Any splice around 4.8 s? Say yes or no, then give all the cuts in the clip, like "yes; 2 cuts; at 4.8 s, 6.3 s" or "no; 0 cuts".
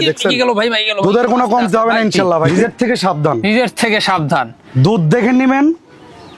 no; 1 cut; at 2.5 s